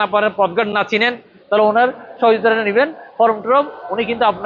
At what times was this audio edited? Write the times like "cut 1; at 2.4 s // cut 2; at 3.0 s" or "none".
none